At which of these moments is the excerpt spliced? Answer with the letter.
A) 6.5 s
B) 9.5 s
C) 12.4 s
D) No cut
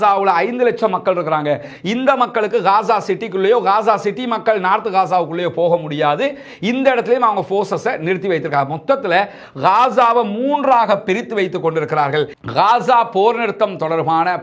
C